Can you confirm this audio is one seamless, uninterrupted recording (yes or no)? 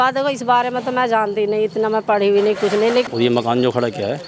no